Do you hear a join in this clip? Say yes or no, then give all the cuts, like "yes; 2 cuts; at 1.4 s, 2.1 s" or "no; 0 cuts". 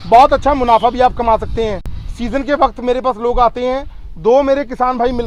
no; 0 cuts